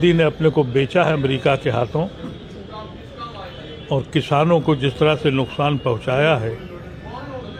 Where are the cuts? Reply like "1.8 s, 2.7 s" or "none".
none